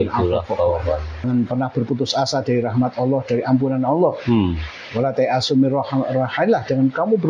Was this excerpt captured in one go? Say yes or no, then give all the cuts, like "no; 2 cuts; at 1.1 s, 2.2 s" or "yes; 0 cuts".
no; 1 cut; at 1.2 s